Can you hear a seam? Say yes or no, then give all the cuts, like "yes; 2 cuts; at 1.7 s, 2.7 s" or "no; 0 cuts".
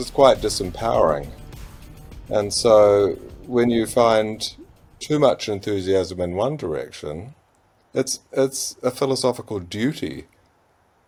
no; 0 cuts